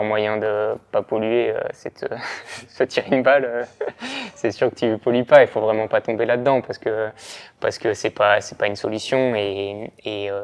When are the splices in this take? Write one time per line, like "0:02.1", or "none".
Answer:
none